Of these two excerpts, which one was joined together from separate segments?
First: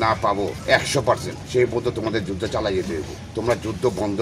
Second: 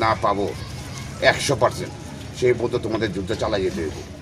first; 2 cuts; at 1.0 s, 3.2 s

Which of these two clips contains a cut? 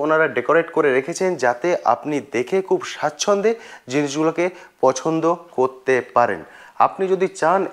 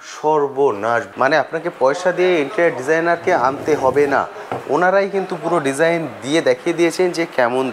second; 1 cut; at 1.1 s

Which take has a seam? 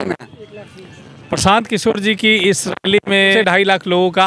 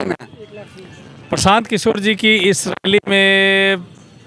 first; 1 cut; at 3.3 s

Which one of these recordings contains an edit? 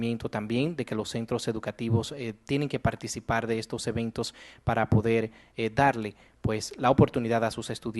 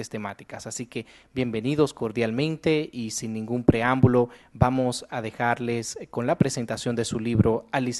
first; 1 cut; at 3.1 s

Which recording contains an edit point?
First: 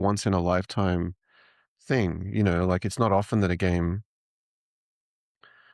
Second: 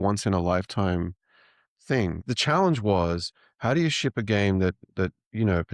second; 1 cut; at 2.2 s

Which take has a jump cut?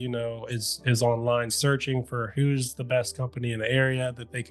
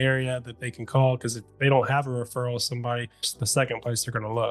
second; 1 cut; at 3.4 s

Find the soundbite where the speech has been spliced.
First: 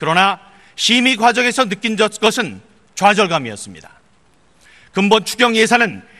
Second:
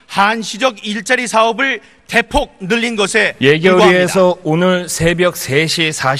first; 1 cut; at 5.1 s

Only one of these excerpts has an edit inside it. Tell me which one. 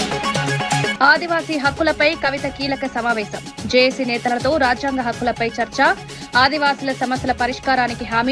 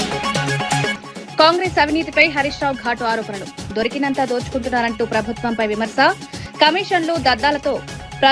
second; 1 cut; at 0.9 s

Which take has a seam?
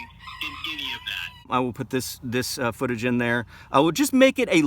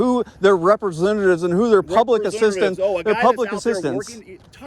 first; 1 cut; at 1.5 s

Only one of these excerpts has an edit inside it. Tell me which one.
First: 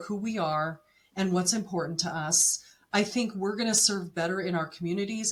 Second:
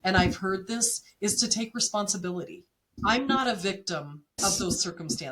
second; 2 cuts; at 2.9 s, 4.4 s

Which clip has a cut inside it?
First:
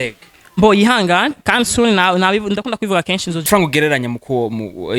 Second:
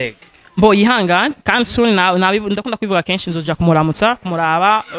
first; 1 cut; at 3.5 s

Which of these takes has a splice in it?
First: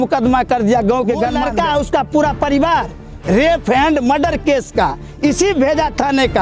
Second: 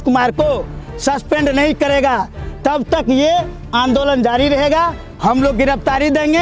first; 1 cut; at 1.4 s

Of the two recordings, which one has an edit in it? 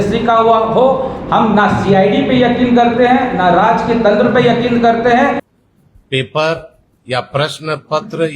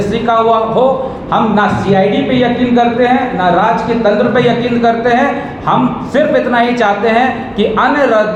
first; 1 cut; at 5.5 s

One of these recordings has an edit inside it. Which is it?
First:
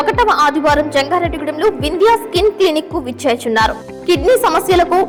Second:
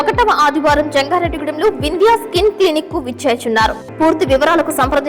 second; 1 cut; at 3.8 s

